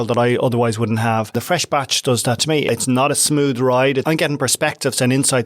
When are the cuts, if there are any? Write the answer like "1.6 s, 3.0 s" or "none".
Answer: 1.4 s, 2.7 s, 4.0 s